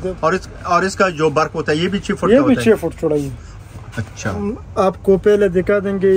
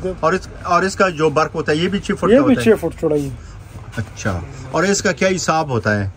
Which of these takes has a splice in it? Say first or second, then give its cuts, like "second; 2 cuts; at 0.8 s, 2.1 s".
first; 1 cut; at 4.4 s